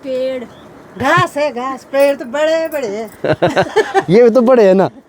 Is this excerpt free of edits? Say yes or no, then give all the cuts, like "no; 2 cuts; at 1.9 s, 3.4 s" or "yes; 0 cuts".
yes; 0 cuts